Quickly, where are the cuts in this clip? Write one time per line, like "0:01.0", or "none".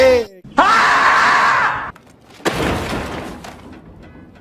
none

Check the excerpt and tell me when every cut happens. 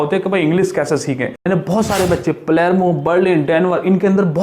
0:01.5

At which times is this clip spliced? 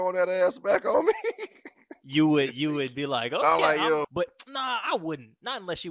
0:04.1

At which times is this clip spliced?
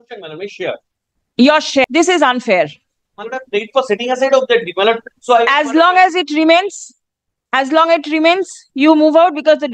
0:01.8

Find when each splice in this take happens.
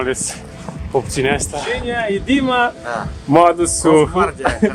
0:01.7

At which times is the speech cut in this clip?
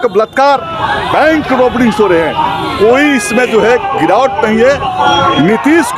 0:04.9

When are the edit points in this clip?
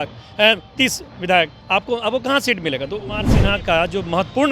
0:03.3

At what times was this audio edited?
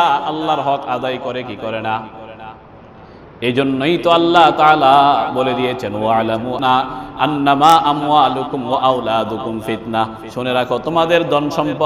0:06.6

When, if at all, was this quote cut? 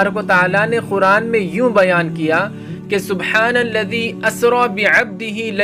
none

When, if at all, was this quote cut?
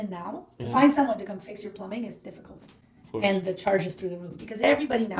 none

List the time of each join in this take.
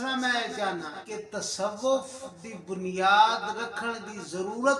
0:01.0

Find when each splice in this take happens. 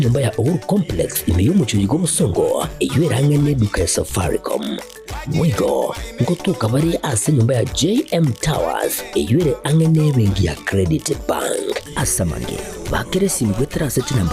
0:12.3

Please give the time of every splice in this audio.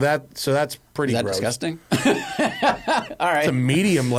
none

